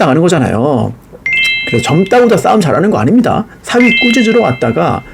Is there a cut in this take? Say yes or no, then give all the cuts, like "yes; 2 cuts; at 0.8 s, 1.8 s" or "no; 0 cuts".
yes; 1 cut; at 3.5 s